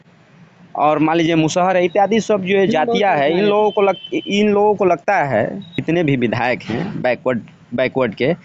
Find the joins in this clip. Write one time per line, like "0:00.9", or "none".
0:05.8